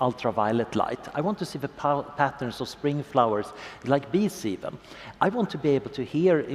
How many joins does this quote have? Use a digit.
0